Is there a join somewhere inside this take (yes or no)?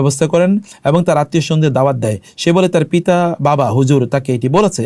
no